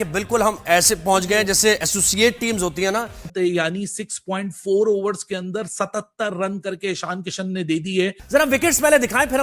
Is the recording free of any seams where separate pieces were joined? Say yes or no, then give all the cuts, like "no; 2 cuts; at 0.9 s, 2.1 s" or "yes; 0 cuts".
no; 2 cuts; at 3.2 s, 8.2 s